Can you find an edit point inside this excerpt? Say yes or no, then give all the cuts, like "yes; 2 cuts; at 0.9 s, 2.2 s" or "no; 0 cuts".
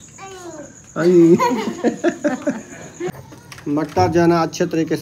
yes; 1 cut; at 3.1 s